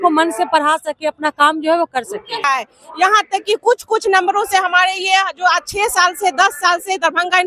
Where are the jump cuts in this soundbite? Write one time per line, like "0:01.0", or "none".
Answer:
0:02.4